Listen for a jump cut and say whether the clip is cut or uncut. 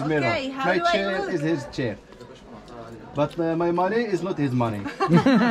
uncut